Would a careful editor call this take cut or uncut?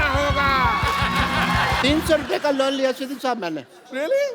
cut